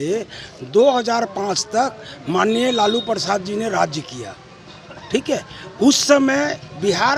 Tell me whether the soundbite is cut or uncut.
uncut